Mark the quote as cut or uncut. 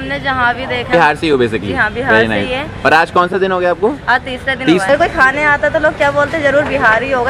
cut